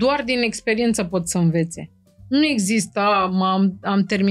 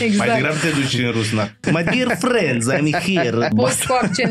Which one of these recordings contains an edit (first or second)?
second